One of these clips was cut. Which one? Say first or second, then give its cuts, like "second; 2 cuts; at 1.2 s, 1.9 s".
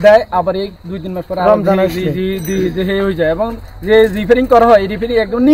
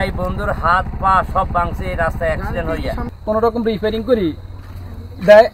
second; 1 cut; at 3.1 s